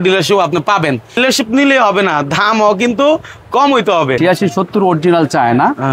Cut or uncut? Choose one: cut